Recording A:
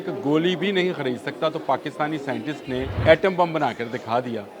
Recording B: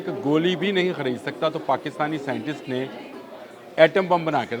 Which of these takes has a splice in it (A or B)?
A